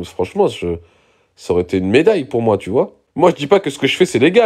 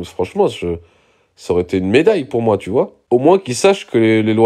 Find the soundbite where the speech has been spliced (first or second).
first